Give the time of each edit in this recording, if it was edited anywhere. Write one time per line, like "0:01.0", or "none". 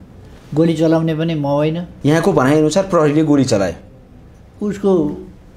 0:01.9